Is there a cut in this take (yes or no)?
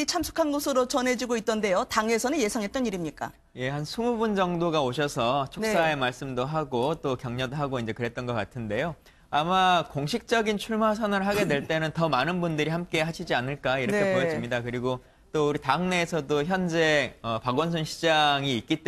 yes